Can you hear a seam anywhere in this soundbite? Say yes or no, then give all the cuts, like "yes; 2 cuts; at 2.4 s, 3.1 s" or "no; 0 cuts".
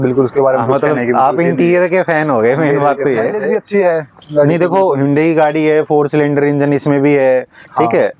no; 0 cuts